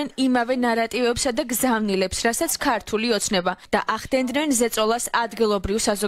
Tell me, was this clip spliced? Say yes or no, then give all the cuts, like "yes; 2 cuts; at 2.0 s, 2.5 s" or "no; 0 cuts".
yes; 1 cut; at 3.6 s